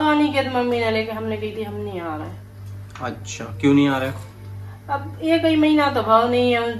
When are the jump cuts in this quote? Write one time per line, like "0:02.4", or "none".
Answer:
none